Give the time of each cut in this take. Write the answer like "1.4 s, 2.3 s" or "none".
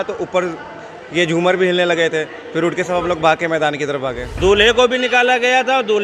4.3 s